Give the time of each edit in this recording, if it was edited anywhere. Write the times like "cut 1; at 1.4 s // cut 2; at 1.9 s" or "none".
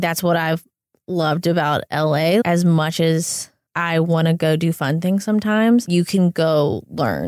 cut 1; at 2.4 s // cut 2; at 5.8 s